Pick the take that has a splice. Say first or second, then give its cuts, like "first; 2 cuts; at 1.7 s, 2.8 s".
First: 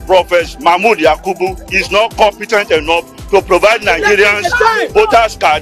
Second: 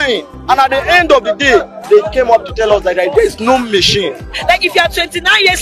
second; 1 cut; at 4.3 s